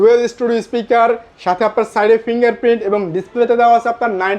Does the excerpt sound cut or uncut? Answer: uncut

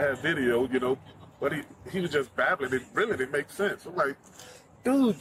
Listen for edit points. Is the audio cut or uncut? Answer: uncut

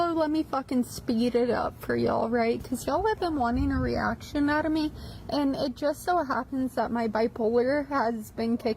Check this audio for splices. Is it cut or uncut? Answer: cut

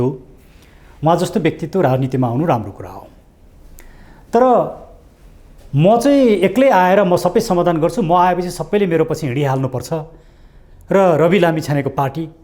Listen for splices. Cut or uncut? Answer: uncut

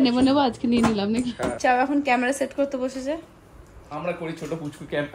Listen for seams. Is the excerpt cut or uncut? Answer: cut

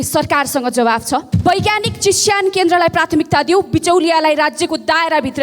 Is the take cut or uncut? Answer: cut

